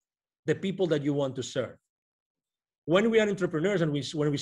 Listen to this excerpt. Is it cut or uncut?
uncut